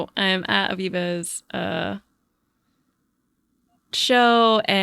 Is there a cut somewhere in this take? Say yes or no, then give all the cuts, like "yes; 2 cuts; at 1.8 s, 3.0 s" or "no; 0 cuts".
no; 0 cuts